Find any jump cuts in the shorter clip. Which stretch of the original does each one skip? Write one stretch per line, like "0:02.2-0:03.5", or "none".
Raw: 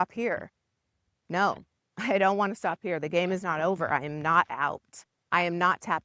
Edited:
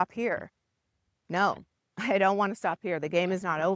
none